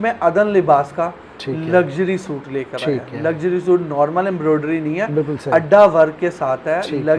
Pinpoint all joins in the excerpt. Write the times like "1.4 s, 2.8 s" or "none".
none